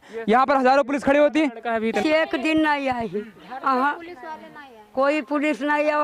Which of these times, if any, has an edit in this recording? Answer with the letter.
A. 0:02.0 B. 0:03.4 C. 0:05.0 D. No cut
A